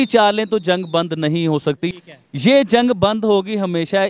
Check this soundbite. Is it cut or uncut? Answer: cut